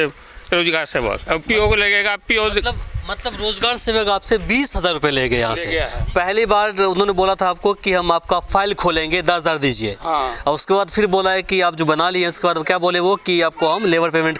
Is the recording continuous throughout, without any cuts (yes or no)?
yes